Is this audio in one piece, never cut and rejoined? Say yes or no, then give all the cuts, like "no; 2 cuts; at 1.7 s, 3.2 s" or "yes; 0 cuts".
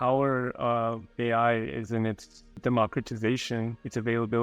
no; 1 cut; at 2.4 s